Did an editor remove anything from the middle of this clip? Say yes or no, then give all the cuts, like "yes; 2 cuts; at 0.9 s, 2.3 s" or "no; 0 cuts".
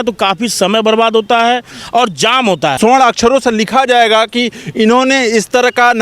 yes; 1 cut; at 2.8 s